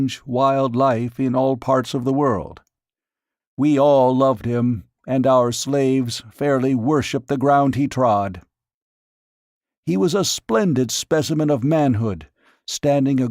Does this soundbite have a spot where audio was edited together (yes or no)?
yes